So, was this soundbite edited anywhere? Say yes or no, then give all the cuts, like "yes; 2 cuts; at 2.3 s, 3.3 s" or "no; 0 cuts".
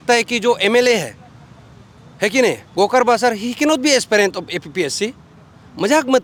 no; 0 cuts